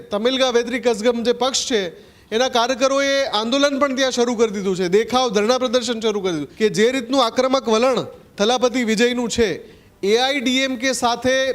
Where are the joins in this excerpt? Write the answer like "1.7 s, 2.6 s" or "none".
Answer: 6.5 s